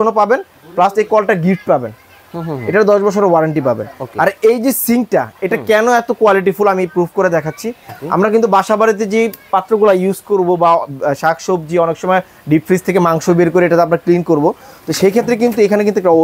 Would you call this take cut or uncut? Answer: uncut